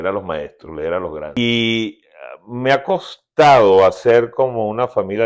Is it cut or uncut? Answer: cut